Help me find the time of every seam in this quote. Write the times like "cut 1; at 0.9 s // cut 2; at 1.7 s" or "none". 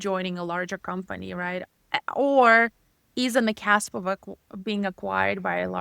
none